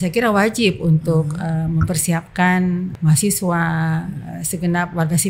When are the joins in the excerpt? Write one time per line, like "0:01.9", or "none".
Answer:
0:02.9